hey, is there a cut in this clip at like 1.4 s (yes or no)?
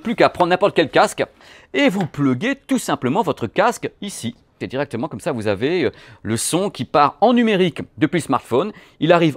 yes